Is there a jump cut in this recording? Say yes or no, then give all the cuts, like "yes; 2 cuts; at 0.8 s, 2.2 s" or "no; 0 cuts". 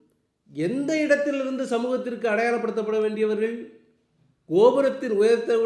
no; 0 cuts